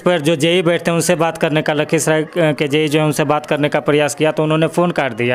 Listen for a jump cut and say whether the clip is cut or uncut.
uncut